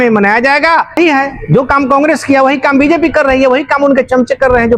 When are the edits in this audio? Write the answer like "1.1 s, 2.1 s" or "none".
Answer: 0.9 s